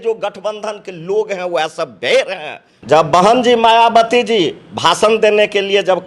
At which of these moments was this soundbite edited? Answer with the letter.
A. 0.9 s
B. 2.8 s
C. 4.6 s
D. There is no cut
B